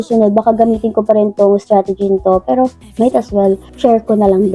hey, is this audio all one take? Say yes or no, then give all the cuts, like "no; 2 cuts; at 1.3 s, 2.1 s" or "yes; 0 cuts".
yes; 0 cuts